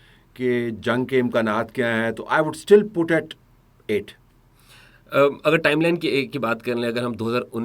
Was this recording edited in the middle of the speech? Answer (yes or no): no